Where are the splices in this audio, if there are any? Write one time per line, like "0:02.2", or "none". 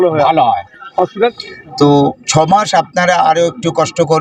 0:01.3